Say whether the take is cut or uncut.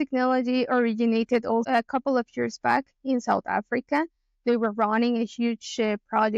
cut